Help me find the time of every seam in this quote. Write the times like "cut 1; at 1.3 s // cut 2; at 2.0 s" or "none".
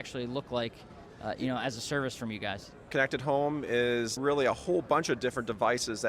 cut 1; at 2.9 s // cut 2; at 4.1 s